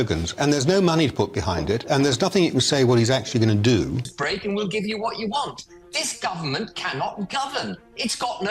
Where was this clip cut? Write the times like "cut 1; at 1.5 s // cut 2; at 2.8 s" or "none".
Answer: cut 1; at 4.2 s